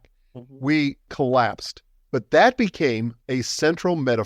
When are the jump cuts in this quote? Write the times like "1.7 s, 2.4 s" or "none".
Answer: 3.1 s